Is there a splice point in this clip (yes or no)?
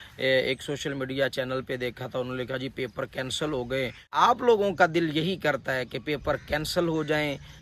yes